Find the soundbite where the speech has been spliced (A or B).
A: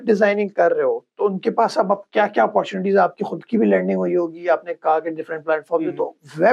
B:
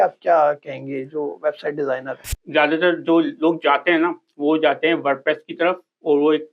B